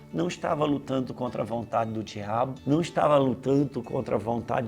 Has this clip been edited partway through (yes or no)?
yes